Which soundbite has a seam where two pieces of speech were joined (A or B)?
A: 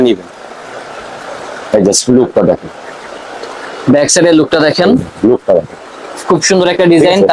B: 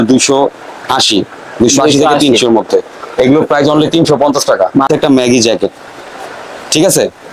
B